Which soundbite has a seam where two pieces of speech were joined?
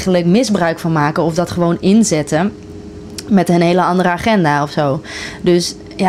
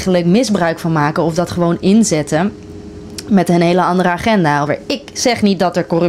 second; 1 cut; at 4.7 s

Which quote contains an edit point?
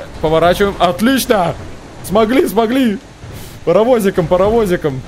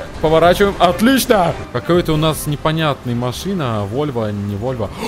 second; 1 cut; at 1.7 s

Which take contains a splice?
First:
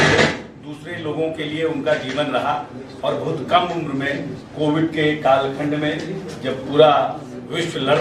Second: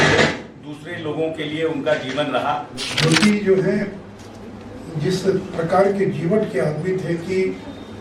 second; 1 cut; at 2.8 s

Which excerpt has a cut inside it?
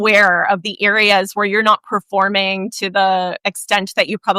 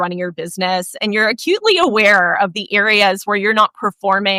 first; 1 cut; at 3.4 s

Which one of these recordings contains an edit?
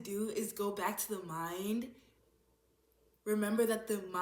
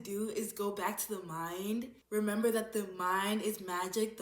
second; 1 cut; at 2.0 s

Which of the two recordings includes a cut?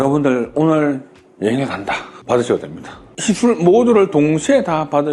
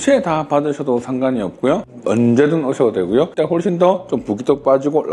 second; 2 cuts; at 1.9 s, 3.3 s

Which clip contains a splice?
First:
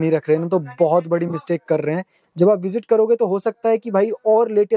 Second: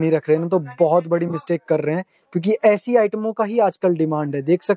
first; 1 cut; at 2.2 s

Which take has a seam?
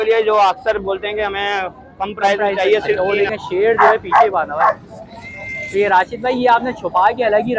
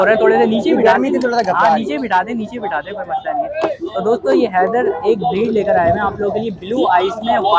first; 1 cut; at 3.0 s

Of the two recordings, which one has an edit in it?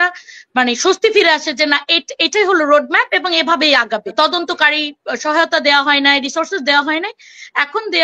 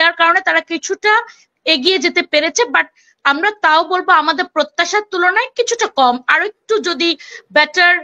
first; 1 cut; at 4.1 s

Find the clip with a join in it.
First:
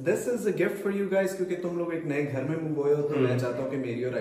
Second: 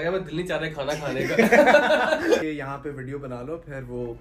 second; 1 cut; at 2.5 s

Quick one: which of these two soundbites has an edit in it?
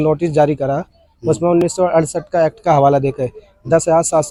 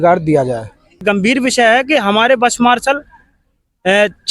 second; 1 cut; at 1.0 s

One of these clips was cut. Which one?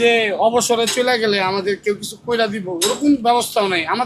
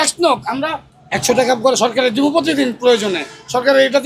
second; 1 cut; at 0.9 s

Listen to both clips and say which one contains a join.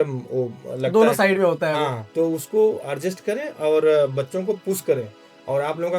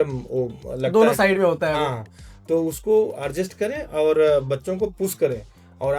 first; 1 cut; at 2.0 s

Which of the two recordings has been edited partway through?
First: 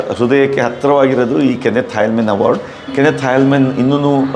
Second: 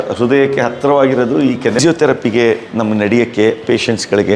second; 1 cut; at 1.8 s

